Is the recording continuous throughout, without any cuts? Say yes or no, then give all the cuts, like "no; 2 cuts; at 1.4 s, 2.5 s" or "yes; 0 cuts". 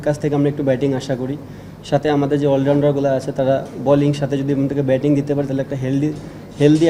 yes; 0 cuts